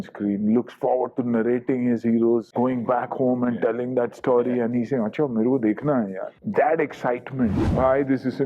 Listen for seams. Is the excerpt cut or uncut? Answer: cut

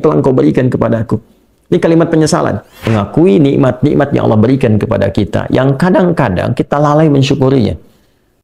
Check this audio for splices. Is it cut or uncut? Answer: cut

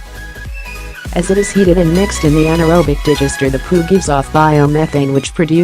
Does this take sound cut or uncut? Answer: cut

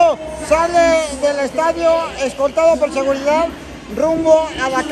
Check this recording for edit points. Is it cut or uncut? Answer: uncut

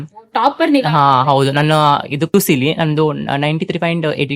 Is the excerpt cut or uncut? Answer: cut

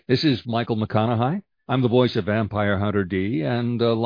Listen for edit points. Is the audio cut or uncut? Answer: cut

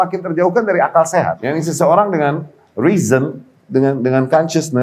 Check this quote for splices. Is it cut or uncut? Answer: cut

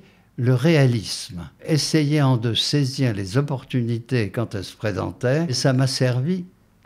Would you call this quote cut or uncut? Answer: cut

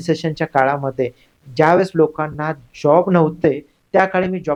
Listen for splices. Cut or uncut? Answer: uncut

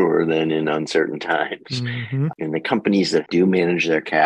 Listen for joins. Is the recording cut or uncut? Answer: cut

